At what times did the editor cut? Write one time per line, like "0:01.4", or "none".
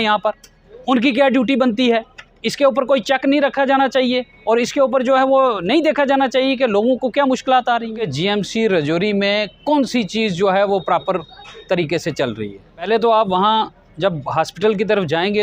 0:07.9
0:12.9